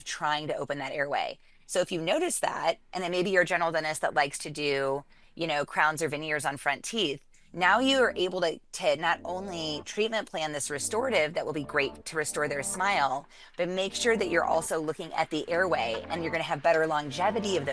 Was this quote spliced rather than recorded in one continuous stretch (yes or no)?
no